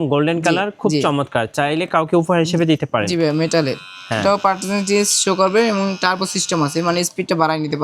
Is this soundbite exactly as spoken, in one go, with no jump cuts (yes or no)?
yes